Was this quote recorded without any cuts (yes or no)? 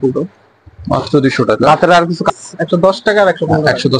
no